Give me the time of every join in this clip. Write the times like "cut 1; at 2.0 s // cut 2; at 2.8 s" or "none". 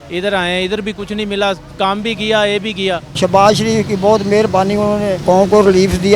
cut 1; at 3.1 s // cut 2; at 5.2 s